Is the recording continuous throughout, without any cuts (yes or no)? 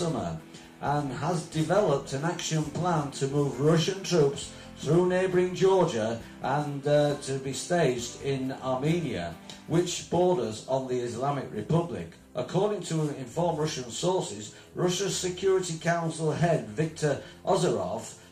yes